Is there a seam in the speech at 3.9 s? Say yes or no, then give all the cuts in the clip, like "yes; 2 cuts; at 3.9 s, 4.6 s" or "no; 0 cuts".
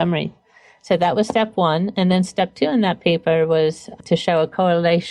yes; 1 cut; at 3.9 s